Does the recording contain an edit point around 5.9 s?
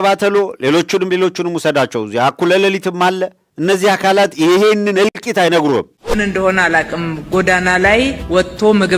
yes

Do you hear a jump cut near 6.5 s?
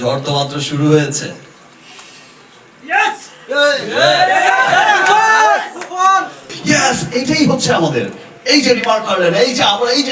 yes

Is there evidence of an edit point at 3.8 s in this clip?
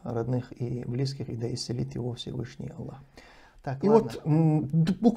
yes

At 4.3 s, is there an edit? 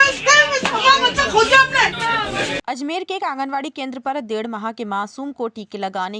no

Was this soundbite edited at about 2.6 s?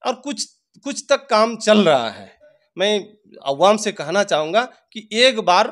yes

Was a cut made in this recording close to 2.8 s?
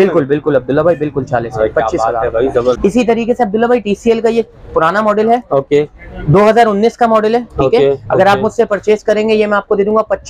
yes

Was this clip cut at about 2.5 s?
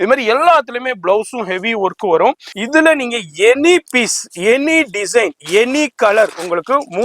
yes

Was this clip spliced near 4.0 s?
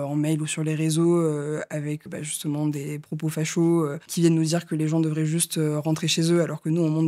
yes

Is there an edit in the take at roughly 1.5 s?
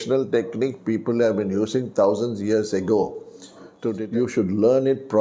no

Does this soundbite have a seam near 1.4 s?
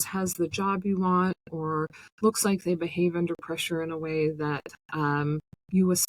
no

